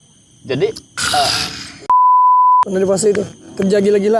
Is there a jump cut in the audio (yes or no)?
yes